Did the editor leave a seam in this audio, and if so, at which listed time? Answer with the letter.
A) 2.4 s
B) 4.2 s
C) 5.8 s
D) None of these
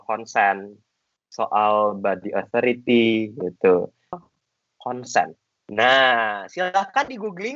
B